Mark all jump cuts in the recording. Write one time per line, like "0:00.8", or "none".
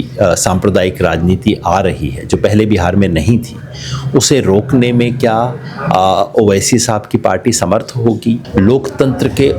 0:08.4